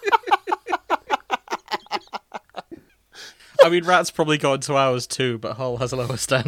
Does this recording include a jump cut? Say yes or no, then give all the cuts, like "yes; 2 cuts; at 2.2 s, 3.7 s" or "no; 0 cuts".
no; 0 cuts